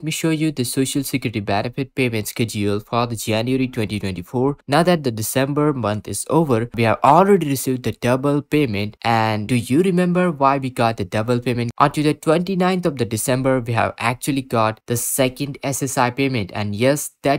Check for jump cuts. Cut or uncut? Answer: cut